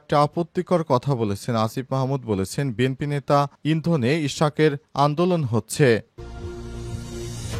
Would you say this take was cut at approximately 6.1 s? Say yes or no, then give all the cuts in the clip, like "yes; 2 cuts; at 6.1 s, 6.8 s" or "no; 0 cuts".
yes; 1 cut; at 6.1 s